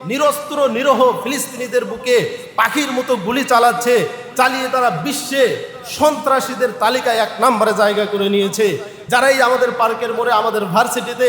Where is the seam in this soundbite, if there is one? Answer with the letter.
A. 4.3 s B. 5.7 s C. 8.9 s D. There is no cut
C